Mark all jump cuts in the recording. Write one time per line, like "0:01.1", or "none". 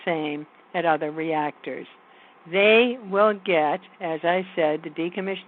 none